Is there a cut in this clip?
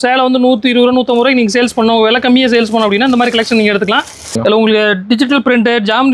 yes; 1 cut; at 4.4 s

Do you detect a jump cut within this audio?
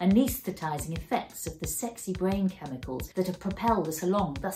yes; 1 cut; at 3.0 s

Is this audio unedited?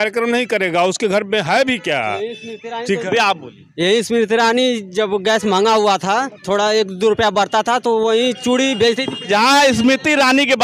yes; 0 cuts

